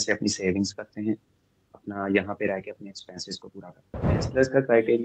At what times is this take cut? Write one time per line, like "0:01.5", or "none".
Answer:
0:04.1